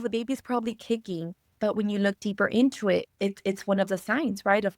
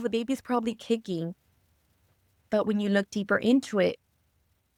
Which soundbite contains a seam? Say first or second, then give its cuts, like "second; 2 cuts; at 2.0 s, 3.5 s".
first; 2 cuts; at 1.4 s, 3.1 s